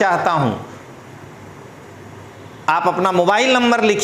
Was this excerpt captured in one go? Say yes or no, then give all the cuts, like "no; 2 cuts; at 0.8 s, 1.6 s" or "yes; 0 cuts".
yes; 0 cuts